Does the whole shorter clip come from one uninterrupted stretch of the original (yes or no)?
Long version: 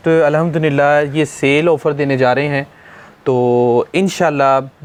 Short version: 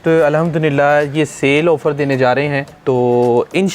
no